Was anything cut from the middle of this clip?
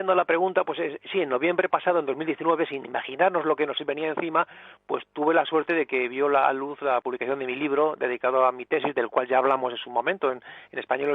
yes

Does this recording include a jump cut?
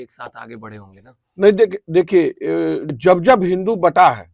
yes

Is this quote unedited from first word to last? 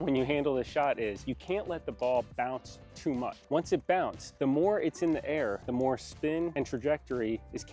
yes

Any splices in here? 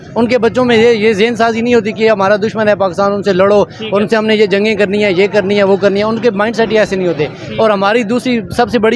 no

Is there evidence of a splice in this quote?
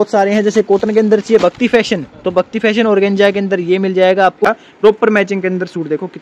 yes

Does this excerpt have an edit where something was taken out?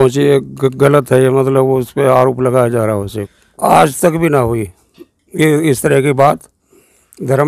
yes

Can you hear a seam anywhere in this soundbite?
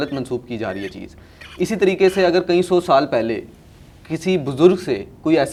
no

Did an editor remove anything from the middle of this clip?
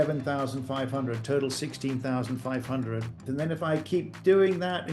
yes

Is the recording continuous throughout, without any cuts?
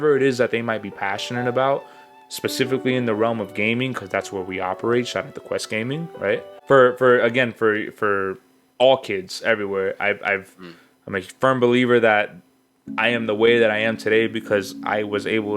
no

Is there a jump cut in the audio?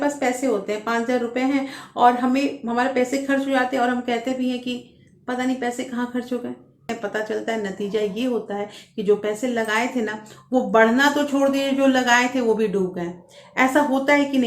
yes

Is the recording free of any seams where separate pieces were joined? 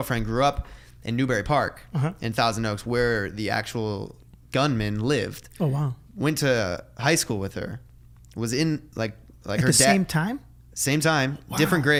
yes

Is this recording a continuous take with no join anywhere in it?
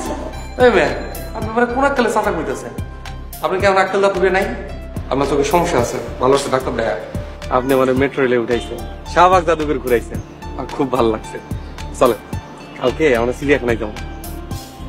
yes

